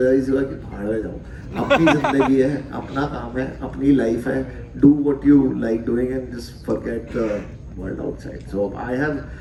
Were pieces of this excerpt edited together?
no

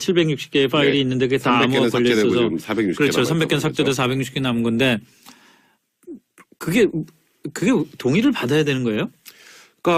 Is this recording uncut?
yes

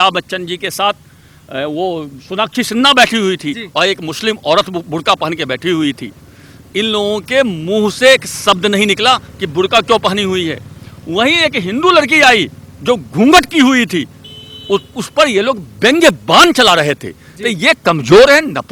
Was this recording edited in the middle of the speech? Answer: no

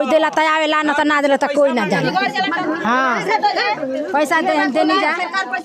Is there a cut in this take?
no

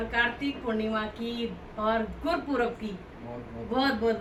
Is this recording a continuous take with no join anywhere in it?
yes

